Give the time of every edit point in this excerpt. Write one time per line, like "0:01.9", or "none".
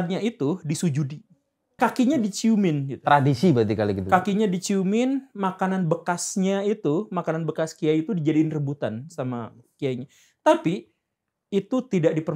0:01.8